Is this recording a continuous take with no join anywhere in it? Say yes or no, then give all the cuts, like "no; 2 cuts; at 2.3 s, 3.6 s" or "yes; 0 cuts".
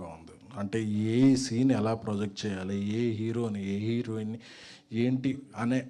yes; 0 cuts